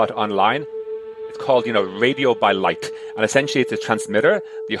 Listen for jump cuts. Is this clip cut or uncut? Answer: cut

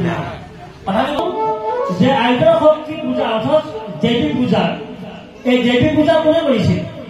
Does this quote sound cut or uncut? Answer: cut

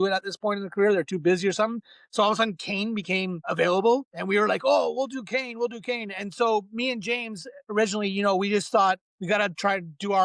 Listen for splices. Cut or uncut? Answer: cut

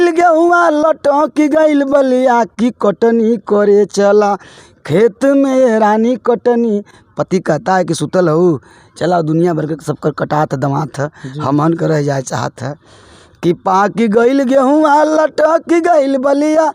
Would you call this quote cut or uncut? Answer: uncut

